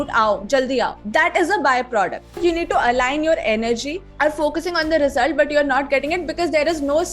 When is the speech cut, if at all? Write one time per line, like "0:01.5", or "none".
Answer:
0:01.0
0:02.4
0:04.0